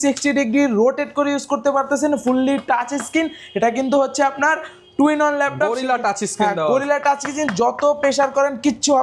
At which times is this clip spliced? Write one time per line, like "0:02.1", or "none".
none